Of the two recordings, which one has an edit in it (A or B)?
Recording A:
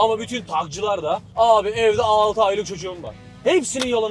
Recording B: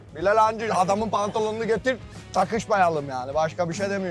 A